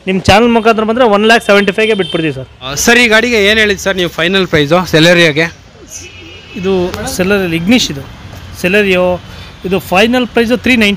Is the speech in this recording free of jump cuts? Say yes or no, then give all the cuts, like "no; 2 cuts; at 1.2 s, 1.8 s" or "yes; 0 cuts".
no; 1 cut; at 2.7 s